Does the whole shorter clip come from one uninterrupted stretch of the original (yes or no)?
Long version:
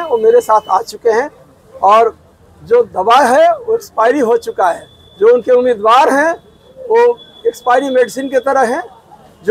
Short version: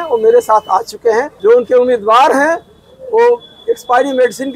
no